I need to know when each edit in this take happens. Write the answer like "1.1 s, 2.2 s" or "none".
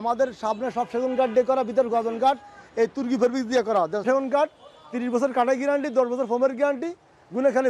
4.0 s

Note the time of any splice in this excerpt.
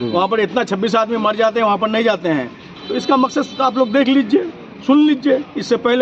none

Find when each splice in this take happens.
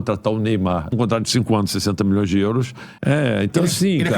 0.9 s, 2.8 s

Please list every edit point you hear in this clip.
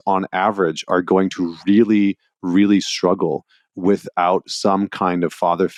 none

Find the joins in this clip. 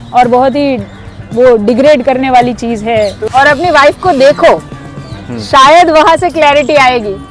3.2 s

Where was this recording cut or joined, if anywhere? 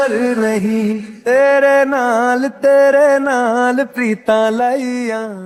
none

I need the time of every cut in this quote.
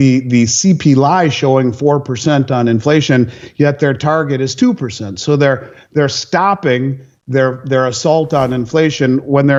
none

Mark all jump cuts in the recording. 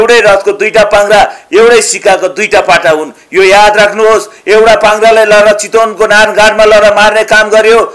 none

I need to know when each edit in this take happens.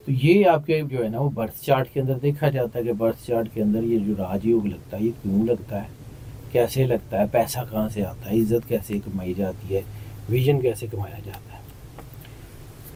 none

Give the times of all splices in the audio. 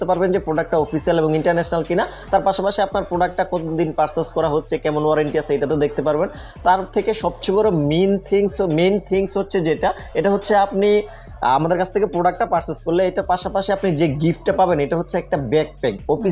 none

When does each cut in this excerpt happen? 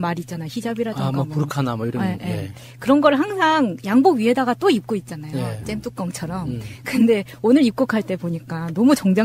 none

